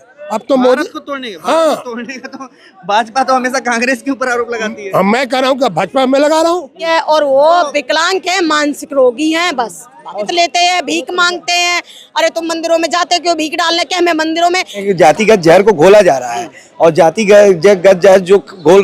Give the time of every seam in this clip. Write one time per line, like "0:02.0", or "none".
0:06.8
0:10.3
0:14.8